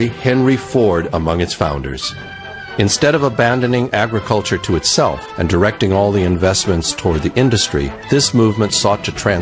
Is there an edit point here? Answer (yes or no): yes